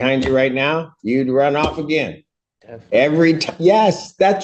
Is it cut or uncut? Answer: uncut